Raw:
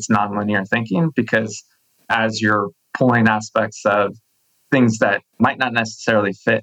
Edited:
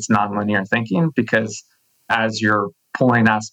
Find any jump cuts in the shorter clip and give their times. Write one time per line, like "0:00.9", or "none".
none